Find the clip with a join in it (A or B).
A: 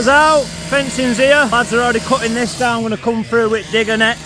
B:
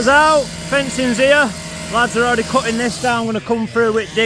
A